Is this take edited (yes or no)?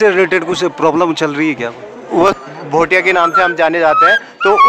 yes